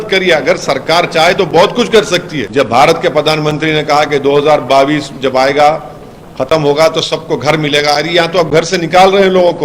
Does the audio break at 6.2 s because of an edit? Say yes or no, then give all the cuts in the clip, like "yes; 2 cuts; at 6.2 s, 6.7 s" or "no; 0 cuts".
no; 1 cut; at 2.4 s